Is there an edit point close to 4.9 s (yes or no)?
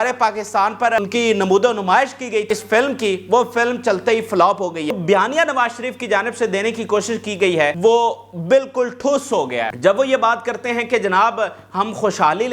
yes